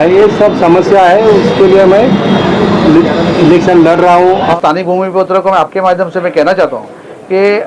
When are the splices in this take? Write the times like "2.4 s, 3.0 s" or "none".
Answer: 4.6 s